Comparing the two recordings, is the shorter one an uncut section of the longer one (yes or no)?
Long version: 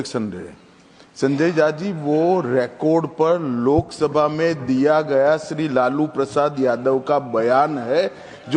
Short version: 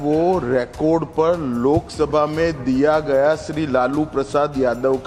yes